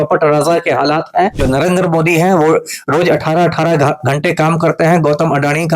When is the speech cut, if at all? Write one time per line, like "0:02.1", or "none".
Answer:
0:01.4